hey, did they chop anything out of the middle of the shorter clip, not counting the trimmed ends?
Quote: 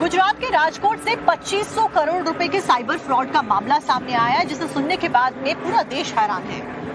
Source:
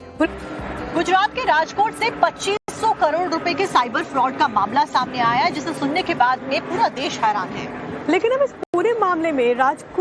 yes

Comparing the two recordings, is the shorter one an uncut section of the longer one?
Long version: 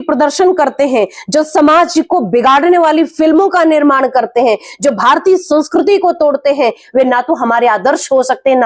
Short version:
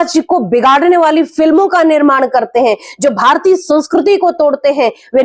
yes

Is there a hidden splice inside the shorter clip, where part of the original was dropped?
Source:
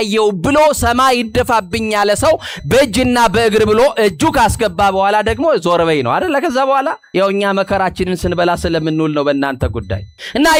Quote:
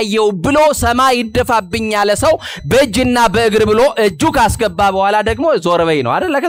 no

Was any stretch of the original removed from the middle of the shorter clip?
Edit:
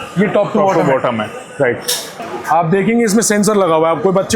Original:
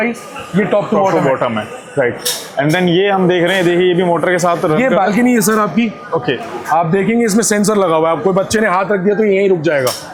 yes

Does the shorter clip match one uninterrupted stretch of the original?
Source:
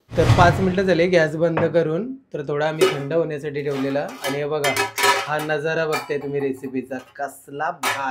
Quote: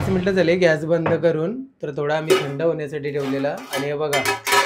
yes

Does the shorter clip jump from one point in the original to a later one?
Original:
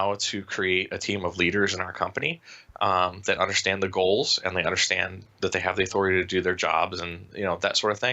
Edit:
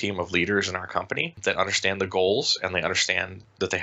yes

